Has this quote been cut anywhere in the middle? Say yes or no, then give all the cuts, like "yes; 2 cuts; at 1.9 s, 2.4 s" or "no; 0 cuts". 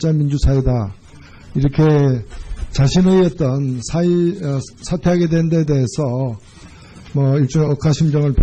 yes; 1 cut; at 2.3 s